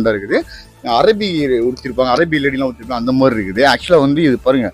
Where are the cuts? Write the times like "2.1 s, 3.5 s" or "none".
none